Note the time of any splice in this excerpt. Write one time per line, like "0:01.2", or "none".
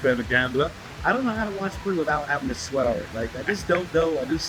0:00.9